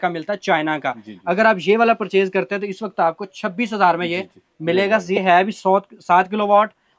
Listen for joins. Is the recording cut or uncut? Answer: uncut